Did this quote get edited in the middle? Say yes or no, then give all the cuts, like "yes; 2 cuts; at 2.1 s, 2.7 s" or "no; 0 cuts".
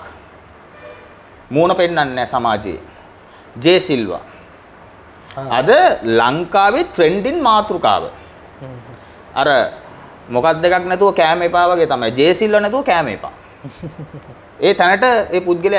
no; 0 cuts